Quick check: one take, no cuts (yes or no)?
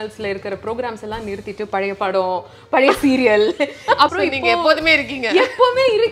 no